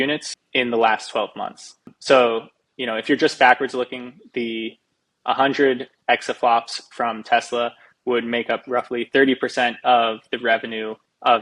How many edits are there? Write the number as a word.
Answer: one